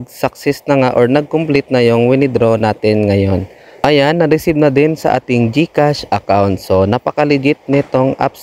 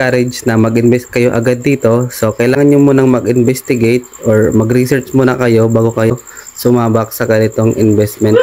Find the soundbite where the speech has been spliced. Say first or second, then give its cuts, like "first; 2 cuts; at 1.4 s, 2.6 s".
first; 1 cut; at 3.8 s